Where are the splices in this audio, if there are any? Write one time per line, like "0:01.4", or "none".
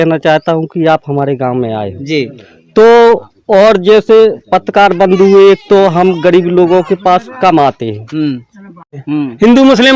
0:09.0